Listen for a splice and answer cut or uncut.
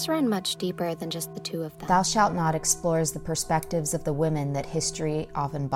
cut